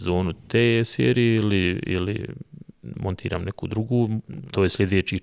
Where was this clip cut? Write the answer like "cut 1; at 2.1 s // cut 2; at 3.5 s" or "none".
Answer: cut 1; at 4.3 s